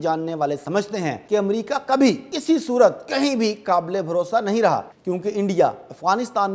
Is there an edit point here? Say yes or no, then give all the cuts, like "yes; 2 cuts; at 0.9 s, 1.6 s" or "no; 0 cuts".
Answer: yes; 3 cuts; at 1.2 s, 2.3 s, 4.9 s